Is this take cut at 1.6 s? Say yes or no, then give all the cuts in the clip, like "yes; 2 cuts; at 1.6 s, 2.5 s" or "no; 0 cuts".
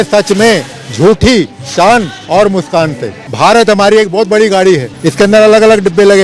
no; 2 cuts; at 3.2 s, 5.0 s